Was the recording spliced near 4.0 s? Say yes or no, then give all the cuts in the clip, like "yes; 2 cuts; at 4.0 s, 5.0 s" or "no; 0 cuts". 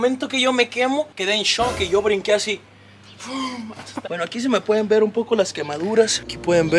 yes; 1 cut; at 4.0 s